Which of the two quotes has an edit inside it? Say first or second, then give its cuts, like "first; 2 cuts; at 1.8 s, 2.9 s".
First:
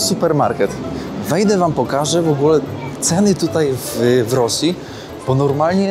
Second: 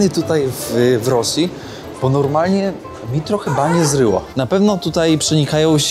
second; 1 cut; at 4.3 s